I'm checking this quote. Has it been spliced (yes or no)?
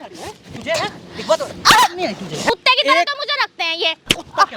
yes